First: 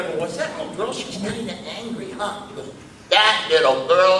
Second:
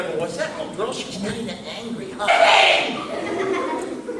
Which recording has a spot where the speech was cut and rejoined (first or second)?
first